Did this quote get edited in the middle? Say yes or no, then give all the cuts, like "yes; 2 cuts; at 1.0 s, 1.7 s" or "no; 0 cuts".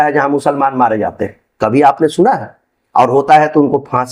no; 0 cuts